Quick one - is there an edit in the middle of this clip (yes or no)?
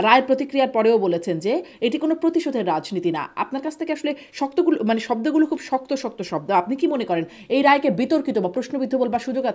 no